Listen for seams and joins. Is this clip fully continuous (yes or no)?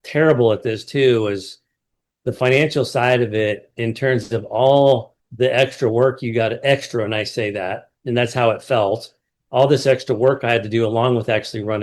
no